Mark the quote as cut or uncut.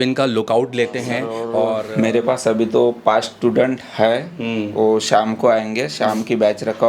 cut